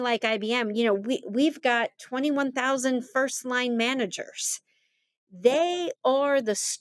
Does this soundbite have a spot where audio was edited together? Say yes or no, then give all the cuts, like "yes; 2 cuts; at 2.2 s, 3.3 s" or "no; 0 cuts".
no; 0 cuts